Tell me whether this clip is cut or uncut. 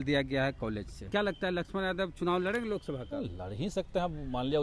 cut